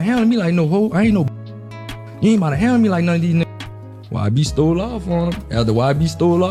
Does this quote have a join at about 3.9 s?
no; 0 cuts

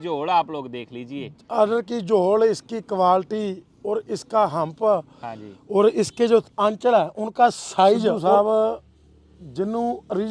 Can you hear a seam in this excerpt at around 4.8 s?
no; 1 cut; at 8.2 s

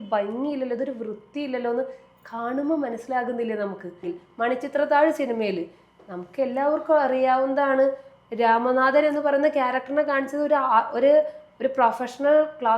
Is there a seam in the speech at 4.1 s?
yes; 1 cut; at 4.1 s

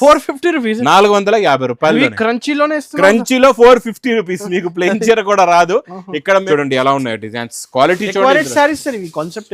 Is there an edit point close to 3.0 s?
no; 1 cut; at 6.4 s

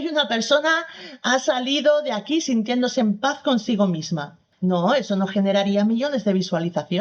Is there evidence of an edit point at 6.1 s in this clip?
no; 0 cuts

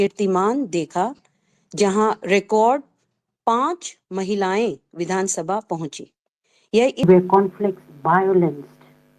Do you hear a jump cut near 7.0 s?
yes; 1 cut; at 7.0 s

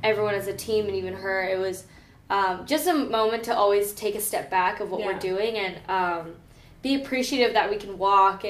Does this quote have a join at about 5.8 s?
no; 0 cuts

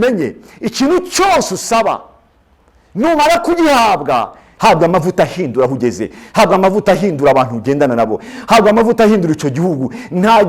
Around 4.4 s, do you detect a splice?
yes; 1 cut; at 4.4 s

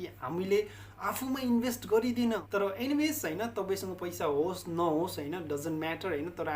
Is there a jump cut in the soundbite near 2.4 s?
yes; 1 cut; at 2.4 s

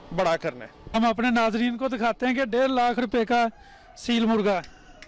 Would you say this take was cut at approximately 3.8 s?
no; 1 cut; at 1.0 s

